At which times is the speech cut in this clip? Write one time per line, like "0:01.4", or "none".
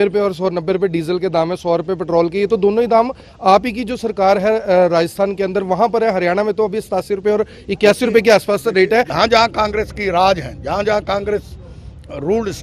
0:09.1